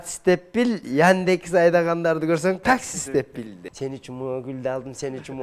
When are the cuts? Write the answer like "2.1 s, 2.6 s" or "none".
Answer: 3.6 s